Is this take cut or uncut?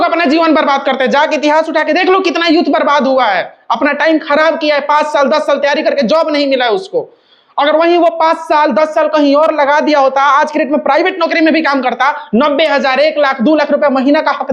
uncut